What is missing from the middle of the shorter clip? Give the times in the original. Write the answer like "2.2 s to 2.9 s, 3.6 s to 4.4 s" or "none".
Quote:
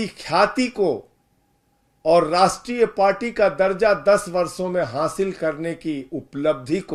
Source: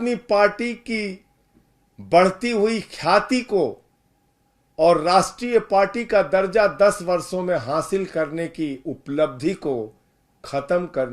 none